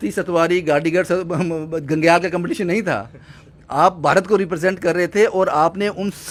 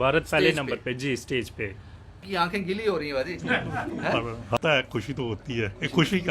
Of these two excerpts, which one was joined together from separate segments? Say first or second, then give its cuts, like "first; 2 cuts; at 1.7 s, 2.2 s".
second; 2 cuts; at 2.2 s, 4.6 s